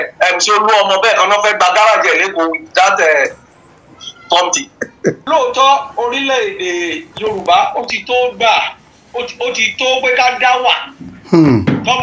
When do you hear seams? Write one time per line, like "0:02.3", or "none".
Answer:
0:05.2